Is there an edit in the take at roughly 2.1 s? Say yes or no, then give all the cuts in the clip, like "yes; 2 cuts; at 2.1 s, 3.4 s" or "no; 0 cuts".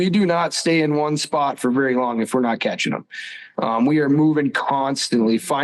no; 0 cuts